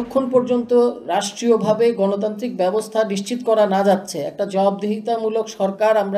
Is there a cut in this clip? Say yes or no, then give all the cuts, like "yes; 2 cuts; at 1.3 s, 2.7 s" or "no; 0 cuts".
no; 0 cuts